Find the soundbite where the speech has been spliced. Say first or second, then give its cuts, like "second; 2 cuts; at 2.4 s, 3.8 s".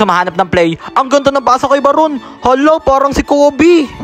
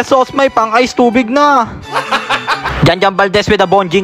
second; 1 cut; at 2.3 s